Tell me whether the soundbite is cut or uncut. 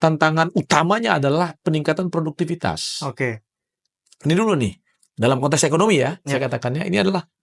uncut